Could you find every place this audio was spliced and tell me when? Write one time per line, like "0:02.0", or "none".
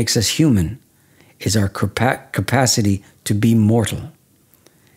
none